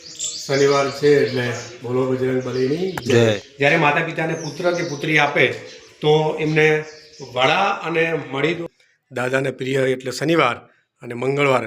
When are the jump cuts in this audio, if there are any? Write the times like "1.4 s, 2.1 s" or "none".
3.5 s, 8.7 s